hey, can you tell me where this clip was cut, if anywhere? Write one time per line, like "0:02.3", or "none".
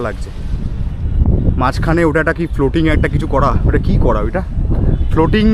none